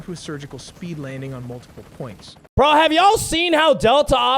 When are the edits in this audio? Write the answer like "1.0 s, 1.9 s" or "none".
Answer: 2.3 s